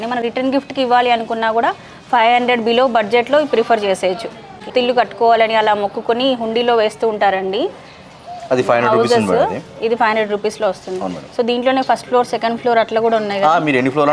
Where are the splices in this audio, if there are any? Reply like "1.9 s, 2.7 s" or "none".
4.7 s